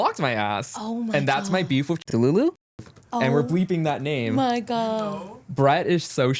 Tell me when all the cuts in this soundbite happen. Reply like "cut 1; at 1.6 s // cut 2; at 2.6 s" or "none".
none